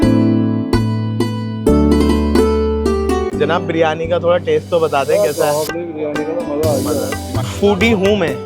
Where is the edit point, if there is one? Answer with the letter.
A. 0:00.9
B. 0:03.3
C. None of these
B